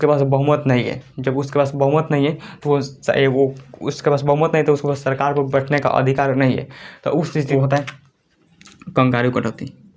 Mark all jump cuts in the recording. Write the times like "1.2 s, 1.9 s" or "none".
7.5 s